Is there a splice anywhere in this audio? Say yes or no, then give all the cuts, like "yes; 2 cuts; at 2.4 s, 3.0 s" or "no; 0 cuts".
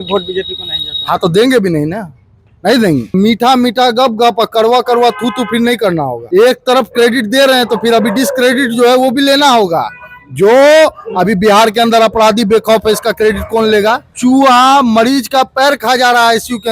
yes; 3 cuts; at 3.1 s, 6.2 s, 14.1 s